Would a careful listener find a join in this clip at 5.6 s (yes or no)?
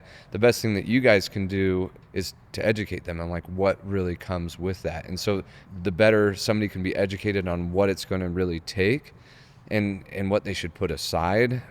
yes